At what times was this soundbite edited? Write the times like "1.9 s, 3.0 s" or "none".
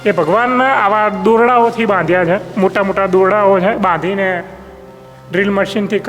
none

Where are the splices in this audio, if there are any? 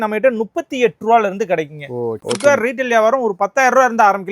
2.2 s

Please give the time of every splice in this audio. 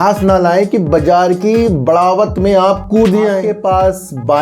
3.5 s

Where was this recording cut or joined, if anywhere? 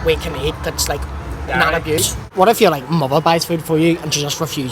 2.3 s

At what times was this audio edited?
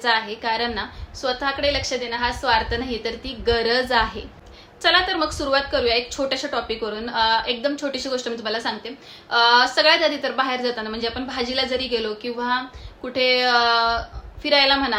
none

